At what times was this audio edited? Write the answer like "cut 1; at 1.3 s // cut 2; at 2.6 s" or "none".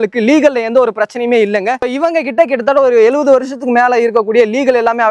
none